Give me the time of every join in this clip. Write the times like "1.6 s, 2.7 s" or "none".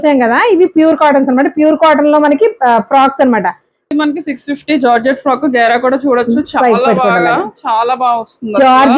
3.7 s